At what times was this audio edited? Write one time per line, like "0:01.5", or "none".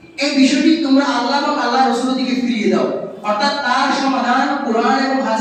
none